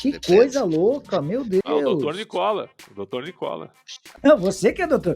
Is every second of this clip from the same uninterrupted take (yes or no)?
no